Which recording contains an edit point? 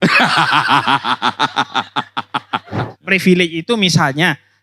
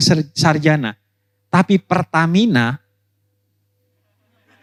first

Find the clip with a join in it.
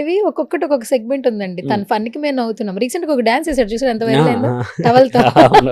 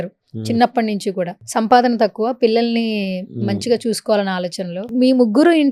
second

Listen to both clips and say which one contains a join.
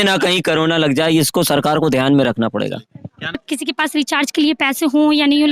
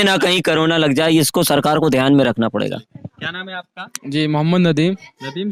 first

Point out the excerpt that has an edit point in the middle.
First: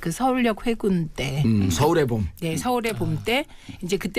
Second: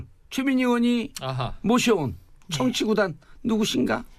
first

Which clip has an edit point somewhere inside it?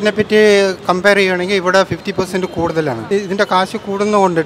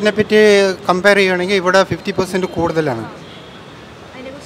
first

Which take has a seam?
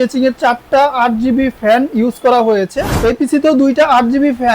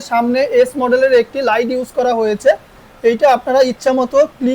first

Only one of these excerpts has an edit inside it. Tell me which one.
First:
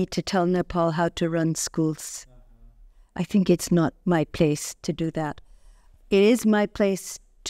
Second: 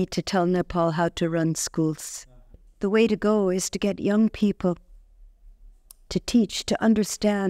second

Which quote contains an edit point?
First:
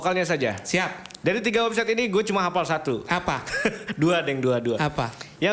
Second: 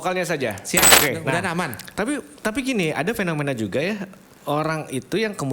second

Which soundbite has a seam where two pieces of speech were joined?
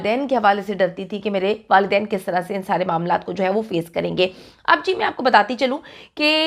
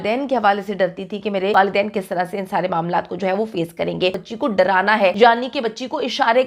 second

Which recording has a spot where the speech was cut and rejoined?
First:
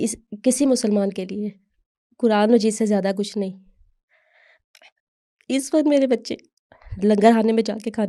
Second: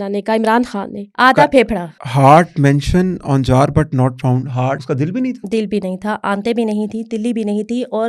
second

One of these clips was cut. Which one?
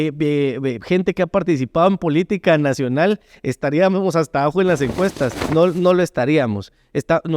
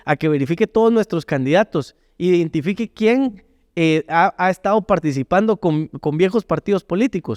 first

